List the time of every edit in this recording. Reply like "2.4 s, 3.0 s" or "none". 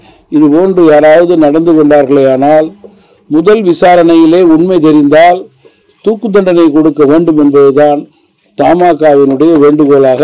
none